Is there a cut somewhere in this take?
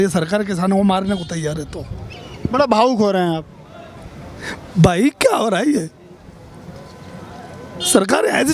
no; 0 cuts

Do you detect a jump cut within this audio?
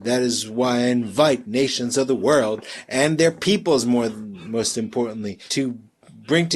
yes; 1 cut; at 5.4 s

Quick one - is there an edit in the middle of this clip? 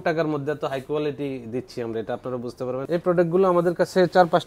yes; 1 cut; at 2.9 s

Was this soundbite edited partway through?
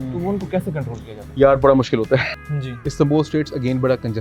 yes; 1 cut; at 2.4 s

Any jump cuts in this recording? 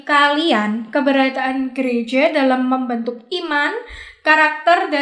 no; 0 cuts

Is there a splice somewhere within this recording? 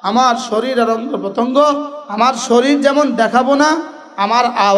yes; 1 cut; at 2.0 s

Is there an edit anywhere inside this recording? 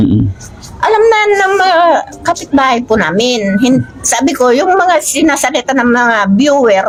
no; 0 cuts

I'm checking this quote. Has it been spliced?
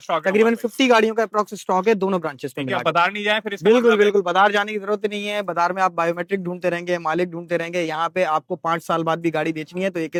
no; 0 cuts

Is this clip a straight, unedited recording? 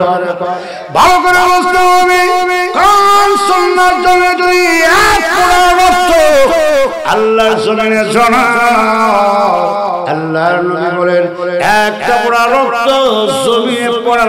yes; 0 cuts

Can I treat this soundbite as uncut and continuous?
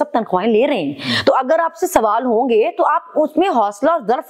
yes; 0 cuts

